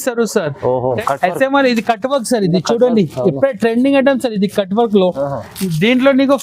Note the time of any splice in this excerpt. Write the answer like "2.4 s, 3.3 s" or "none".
1.0 s